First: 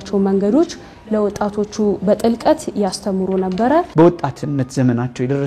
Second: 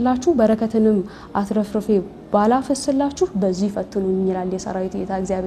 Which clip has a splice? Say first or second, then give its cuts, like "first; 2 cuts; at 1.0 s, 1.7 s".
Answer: first; 1 cut; at 3.9 s